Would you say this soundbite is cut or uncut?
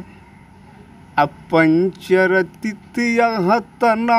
uncut